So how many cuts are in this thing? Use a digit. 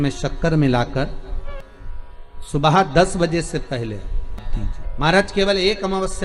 2